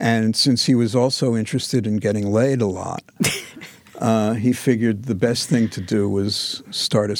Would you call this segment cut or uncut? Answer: uncut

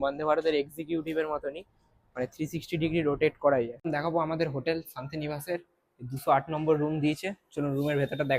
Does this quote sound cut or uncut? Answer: cut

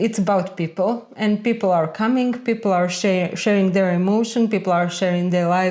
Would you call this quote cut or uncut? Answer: uncut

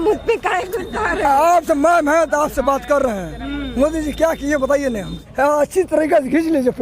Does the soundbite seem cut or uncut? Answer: cut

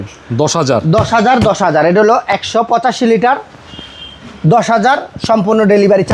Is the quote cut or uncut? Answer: uncut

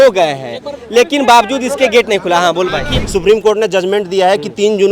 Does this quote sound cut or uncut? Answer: cut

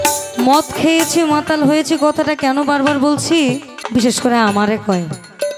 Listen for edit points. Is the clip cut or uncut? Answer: cut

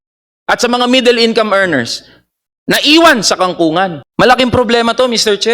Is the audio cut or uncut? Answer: cut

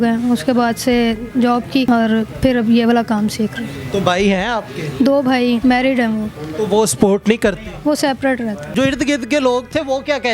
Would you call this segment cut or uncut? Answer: uncut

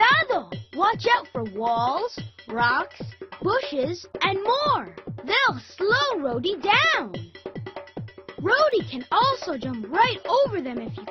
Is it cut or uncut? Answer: cut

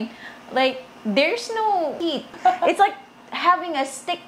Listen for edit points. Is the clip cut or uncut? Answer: cut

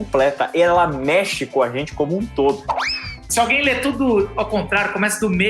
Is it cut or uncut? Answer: cut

